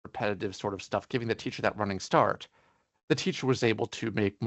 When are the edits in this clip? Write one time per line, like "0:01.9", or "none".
none